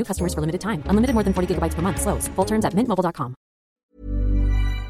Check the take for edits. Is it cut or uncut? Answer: cut